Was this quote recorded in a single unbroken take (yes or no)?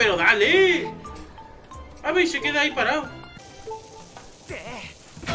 no